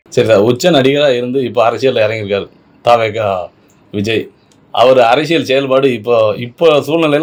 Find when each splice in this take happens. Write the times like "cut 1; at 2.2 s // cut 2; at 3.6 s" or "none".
none